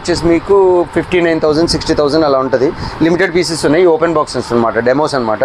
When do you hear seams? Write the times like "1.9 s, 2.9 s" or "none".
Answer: none